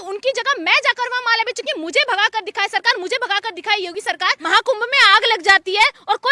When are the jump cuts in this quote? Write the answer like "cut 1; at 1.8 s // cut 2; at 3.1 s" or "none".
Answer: cut 1; at 4.2 s